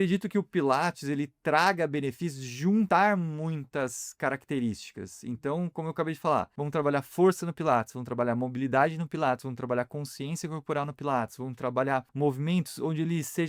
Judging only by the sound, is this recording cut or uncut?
cut